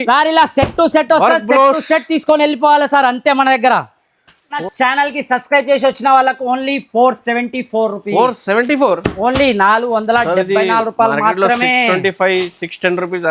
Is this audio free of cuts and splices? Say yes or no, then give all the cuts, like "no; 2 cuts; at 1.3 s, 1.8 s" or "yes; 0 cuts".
no; 1 cut; at 4.6 s